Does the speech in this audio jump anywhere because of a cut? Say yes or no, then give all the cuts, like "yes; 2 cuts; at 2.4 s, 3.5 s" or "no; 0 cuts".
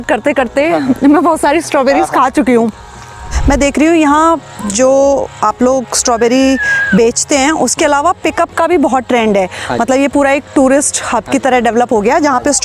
no; 0 cuts